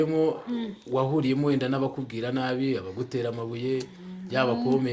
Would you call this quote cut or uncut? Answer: uncut